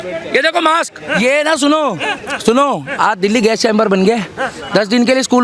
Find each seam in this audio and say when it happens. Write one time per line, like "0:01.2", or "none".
0:01.2